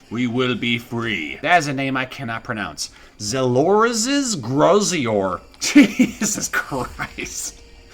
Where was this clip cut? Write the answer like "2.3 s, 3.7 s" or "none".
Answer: 1.4 s